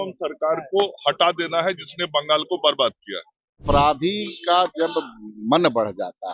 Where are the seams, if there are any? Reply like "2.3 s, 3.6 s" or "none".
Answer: 3.6 s